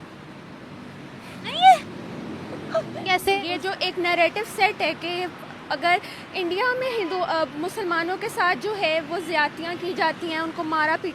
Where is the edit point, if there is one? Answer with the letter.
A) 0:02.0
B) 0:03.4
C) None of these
B